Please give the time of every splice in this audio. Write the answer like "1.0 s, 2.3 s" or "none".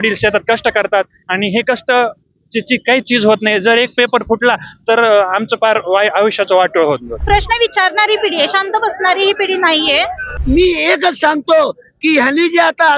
7.1 s, 10.3 s